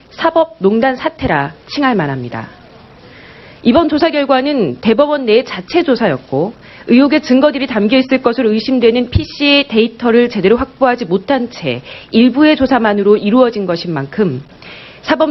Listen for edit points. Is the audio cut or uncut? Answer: cut